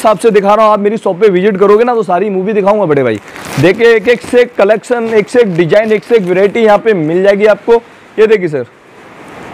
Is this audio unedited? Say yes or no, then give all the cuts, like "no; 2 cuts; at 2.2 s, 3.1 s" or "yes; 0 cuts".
yes; 0 cuts